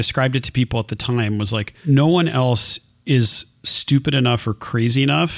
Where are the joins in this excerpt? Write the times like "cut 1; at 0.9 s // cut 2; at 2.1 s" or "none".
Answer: none